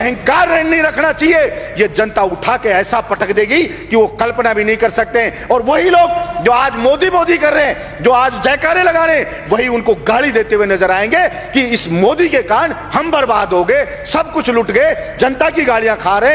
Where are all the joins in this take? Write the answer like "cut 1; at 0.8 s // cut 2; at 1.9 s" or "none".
none